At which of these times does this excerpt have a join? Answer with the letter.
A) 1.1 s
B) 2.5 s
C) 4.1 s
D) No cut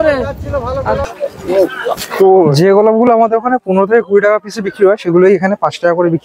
A